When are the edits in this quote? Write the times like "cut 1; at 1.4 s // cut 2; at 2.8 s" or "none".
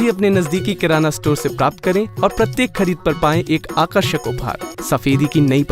cut 1; at 4.7 s

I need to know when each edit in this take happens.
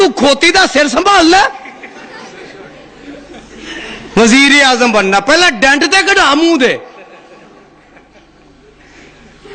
cut 1; at 5.4 s

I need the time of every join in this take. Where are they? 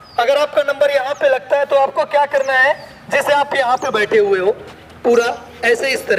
none

